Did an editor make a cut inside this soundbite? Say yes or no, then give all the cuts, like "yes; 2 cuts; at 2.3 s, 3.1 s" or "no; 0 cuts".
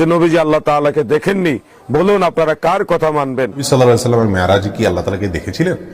yes; 1 cut; at 3.6 s